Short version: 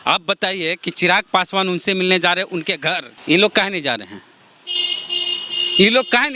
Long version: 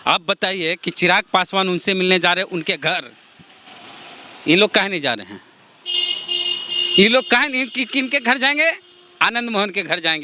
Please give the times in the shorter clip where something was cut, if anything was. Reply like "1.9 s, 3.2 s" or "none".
3.1 s